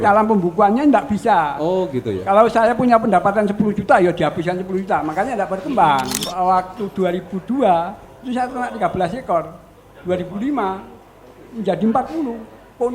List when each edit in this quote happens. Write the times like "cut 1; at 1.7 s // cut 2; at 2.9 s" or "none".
cut 1; at 6.3 s